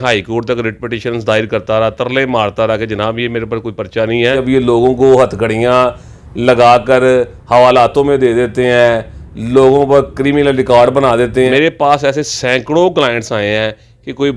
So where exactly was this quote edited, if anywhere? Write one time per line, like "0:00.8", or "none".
0:04.4
0:11.5